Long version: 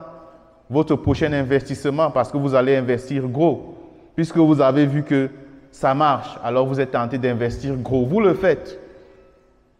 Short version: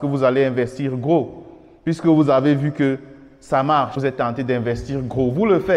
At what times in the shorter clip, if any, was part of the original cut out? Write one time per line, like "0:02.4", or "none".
0:04.0